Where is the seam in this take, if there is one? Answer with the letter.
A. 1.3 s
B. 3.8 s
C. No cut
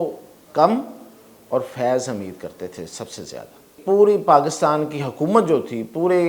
B